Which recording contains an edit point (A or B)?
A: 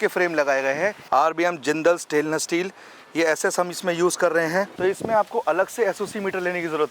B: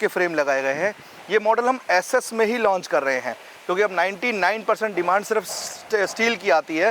A